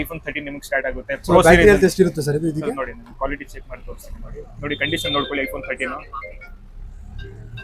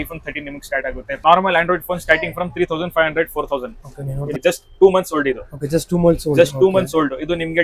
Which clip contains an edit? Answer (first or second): second